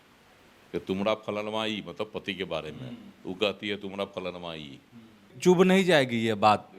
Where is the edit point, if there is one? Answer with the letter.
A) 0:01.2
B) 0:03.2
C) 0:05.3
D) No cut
C